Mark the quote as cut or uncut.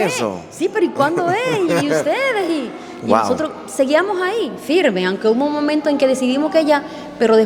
uncut